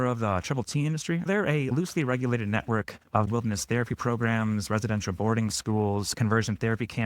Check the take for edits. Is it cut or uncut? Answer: cut